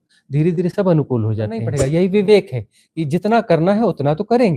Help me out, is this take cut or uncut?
cut